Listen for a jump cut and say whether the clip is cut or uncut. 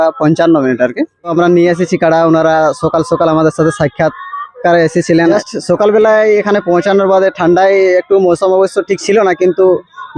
cut